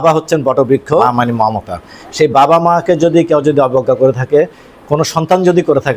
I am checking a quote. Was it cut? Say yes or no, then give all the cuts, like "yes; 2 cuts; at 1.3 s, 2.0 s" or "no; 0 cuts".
yes; 1 cut; at 1.0 s